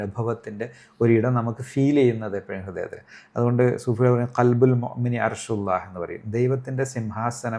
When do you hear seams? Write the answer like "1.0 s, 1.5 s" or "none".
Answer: none

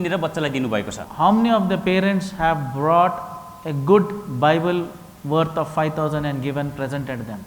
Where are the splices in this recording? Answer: 1.0 s

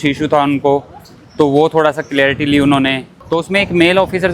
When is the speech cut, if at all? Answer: none

